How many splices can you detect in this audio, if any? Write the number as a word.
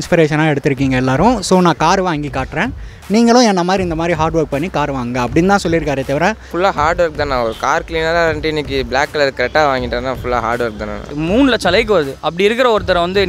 two